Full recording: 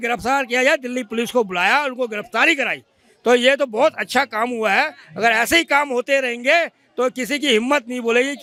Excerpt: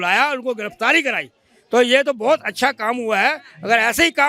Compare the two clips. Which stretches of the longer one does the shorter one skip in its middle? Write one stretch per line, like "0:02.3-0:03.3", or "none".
none